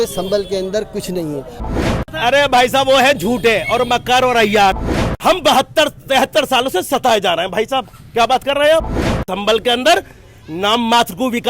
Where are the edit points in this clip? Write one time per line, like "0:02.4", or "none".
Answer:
0:01.6
0:04.8
0:09.2